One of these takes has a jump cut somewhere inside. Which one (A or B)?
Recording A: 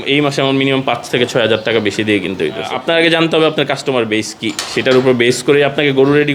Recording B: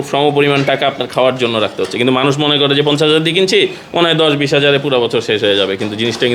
A